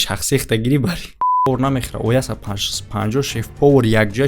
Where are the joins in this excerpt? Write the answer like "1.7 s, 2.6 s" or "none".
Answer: 1.3 s